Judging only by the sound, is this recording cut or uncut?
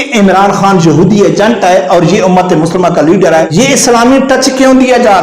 cut